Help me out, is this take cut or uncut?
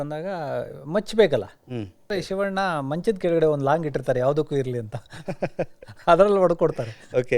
cut